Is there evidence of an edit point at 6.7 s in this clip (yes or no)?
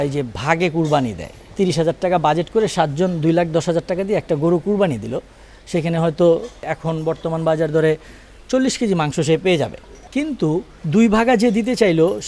yes